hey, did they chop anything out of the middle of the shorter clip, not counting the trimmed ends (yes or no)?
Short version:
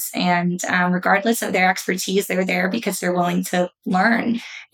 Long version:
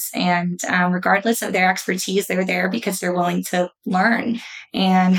no